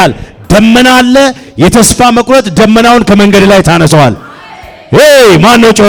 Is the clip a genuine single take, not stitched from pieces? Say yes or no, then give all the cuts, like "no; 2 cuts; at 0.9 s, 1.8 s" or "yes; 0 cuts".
yes; 0 cuts